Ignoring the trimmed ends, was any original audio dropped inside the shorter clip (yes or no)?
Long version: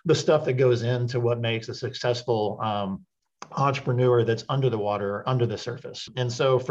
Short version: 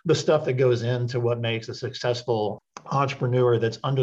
yes